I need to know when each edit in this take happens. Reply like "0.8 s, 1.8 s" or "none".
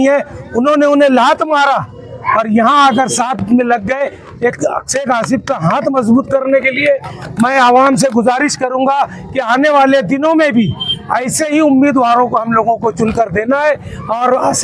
none